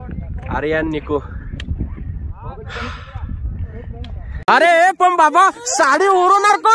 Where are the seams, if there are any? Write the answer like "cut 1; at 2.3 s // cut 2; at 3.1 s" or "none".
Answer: cut 1; at 4.4 s